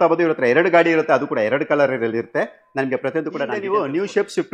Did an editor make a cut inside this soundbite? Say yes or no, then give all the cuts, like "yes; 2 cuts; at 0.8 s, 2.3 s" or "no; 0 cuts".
yes; 1 cut; at 3.5 s